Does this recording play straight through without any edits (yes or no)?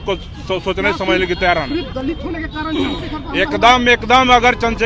yes